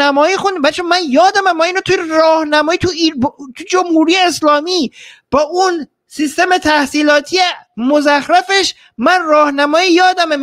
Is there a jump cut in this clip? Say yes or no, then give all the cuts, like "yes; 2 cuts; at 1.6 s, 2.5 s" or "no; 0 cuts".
no; 0 cuts